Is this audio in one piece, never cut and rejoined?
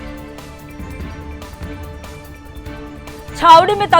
no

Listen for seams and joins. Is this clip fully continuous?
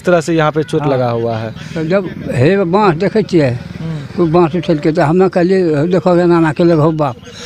yes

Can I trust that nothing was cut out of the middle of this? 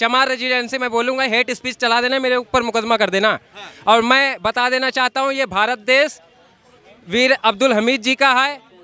yes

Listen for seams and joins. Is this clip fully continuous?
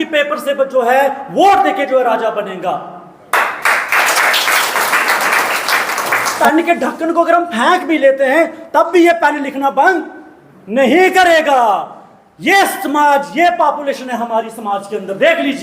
no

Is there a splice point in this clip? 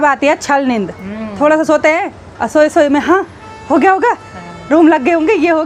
no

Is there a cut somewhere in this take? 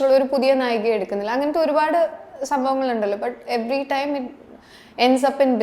no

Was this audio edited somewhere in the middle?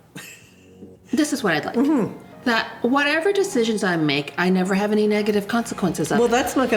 no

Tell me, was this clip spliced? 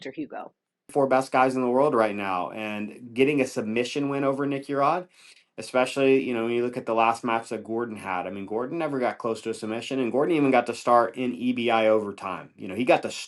yes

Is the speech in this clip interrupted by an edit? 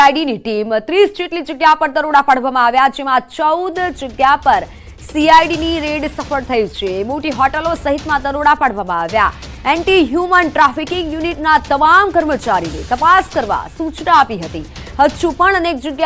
no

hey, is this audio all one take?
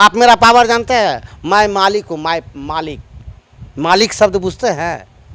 yes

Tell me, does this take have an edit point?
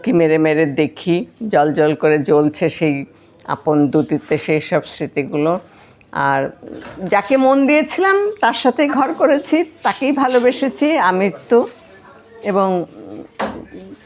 no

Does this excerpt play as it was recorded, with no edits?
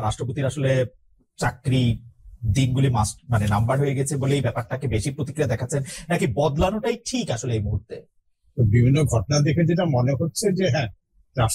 yes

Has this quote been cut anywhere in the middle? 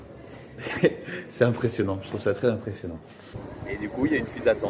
yes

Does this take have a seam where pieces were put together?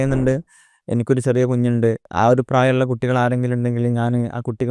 yes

